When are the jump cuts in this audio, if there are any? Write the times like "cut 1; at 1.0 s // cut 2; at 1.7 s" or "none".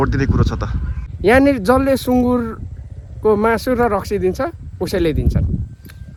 none